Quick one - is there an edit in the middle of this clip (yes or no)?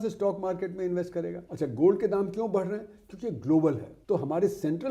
yes